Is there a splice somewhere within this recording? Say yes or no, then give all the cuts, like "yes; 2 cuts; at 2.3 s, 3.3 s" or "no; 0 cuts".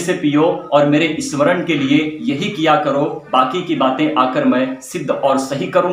no; 0 cuts